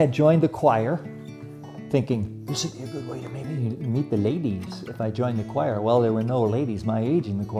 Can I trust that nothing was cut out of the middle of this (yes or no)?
yes